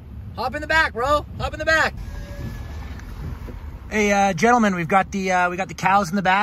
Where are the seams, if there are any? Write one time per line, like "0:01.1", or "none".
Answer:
0:02.0